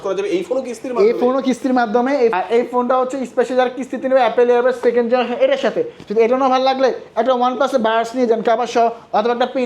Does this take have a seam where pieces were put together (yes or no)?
yes